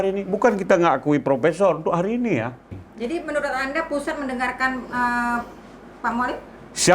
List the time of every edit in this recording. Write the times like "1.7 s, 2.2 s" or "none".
2.9 s